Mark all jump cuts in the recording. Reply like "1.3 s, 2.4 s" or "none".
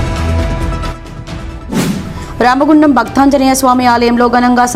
1.0 s